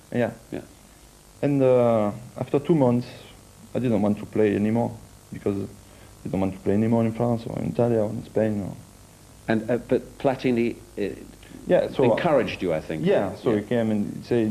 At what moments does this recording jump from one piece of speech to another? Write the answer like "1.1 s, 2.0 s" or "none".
7.7 s